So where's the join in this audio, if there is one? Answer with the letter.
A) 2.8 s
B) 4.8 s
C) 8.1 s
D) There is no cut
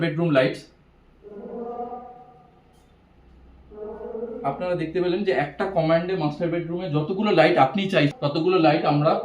C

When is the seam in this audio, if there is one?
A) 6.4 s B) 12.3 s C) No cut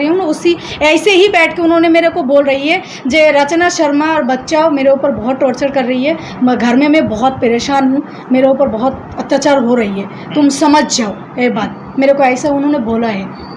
C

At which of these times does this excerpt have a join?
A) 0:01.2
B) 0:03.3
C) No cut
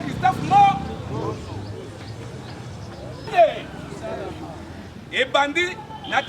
B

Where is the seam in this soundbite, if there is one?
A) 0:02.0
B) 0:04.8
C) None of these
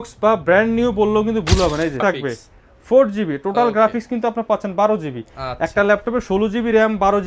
A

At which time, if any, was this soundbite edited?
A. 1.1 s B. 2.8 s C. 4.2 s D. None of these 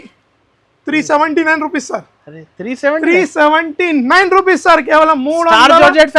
D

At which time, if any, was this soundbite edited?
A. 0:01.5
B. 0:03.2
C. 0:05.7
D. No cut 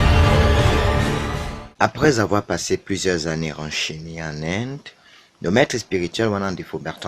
A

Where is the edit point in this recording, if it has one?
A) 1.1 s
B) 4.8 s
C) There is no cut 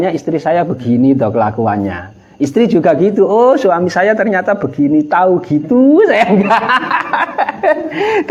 C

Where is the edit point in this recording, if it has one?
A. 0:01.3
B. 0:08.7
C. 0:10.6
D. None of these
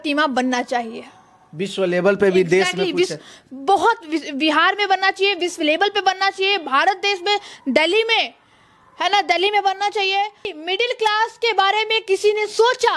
C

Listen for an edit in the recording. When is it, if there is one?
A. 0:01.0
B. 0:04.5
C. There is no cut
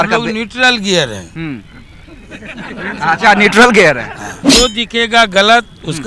B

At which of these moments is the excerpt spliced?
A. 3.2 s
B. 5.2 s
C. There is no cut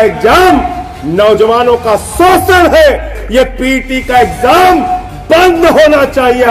A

